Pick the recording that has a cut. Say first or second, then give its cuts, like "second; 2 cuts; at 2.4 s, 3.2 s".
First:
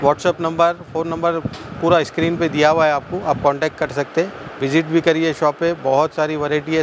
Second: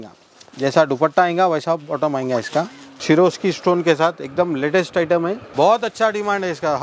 second; 2 cuts; at 2.8 s, 5.4 s